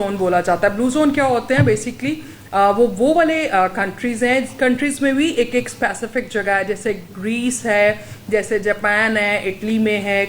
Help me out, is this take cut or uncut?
uncut